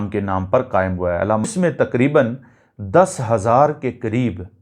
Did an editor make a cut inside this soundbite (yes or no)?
yes